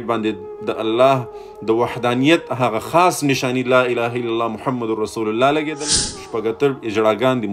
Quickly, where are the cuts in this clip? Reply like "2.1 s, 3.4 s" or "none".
5.8 s